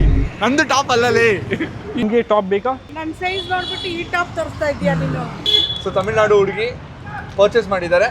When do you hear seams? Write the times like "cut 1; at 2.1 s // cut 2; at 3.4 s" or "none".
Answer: cut 1; at 1.9 s // cut 2; at 5.4 s